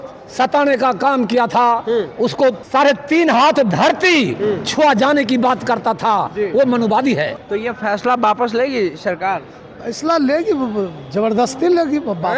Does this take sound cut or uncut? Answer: cut